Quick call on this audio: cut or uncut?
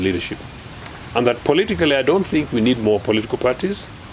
uncut